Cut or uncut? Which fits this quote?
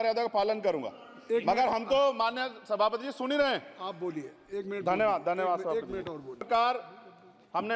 cut